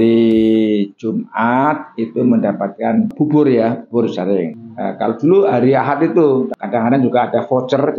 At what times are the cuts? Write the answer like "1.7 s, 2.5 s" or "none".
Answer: 6.5 s